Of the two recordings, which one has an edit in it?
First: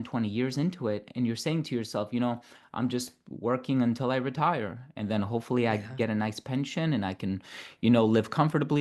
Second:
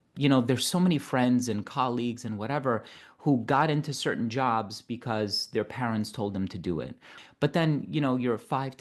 second; 1 cut; at 7.1 s

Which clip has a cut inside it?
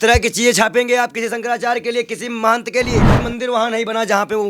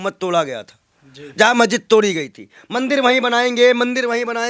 first; 1 cut; at 3.2 s

